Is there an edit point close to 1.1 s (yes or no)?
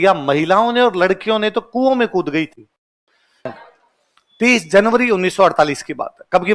no